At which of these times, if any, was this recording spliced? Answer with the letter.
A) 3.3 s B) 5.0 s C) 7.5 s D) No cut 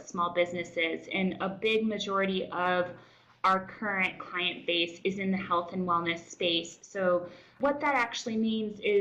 C